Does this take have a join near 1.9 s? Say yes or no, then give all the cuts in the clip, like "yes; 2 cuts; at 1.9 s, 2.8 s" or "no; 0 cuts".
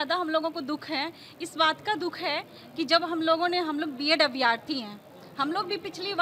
no; 0 cuts